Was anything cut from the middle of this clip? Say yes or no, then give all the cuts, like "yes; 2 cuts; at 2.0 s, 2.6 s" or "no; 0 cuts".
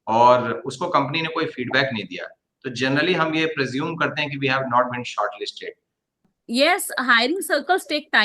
yes; 1 cut; at 6.2 s